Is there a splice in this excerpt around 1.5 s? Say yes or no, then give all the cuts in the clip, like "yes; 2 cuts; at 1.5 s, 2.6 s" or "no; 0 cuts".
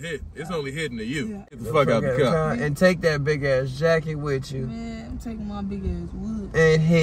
yes; 1 cut; at 1.5 s